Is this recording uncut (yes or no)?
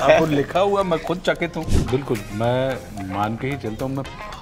no